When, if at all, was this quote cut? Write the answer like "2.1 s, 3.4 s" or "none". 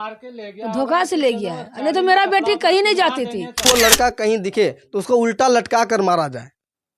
3.6 s